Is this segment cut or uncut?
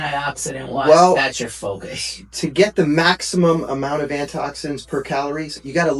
uncut